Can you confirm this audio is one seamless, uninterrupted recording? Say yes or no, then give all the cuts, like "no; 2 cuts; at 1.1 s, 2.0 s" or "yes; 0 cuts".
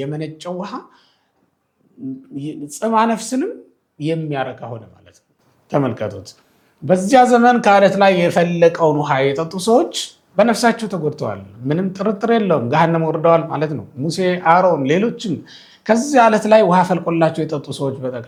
yes; 0 cuts